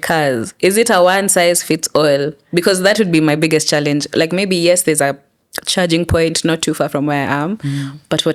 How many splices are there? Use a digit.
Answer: 0